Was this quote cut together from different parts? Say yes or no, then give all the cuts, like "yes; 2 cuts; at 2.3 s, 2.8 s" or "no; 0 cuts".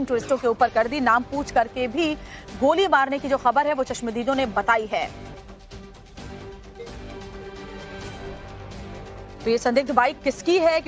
no; 0 cuts